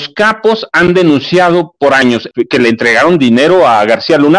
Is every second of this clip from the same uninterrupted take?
no; 1 cut; at 2.2 s

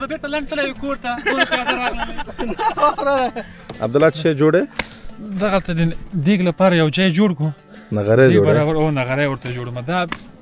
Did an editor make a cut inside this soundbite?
yes; 1 cut; at 3.7 s

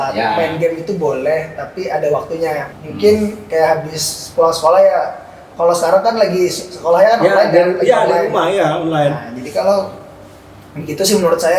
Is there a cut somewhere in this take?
no; 0 cuts

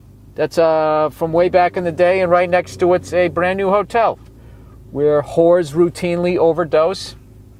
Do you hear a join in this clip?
no; 0 cuts

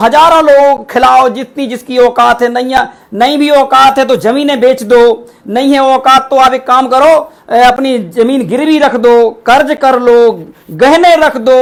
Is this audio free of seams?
yes; 0 cuts

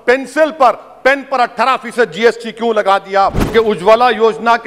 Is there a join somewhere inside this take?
yes; 1 cut; at 3.5 s

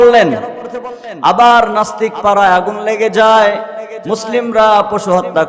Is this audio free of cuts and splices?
yes; 0 cuts

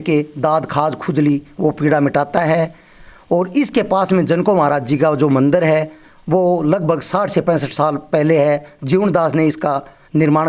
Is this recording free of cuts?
yes; 0 cuts

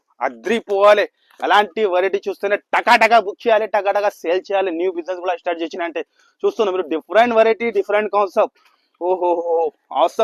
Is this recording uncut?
yes; 0 cuts

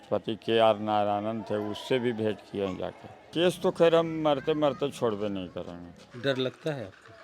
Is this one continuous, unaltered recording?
no; 2 cuts; at 3.3 s, 6.0 s

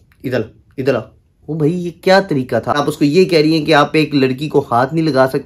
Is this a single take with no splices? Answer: no; 1 cut; at 2.8 s

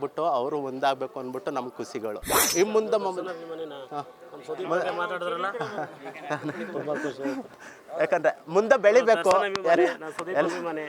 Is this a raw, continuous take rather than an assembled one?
no; 1 cut; at 2.4 s

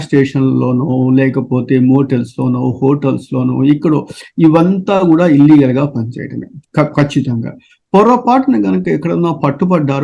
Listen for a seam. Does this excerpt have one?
no; 0 cuts

